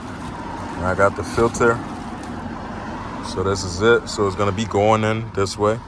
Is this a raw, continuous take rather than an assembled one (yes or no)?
yes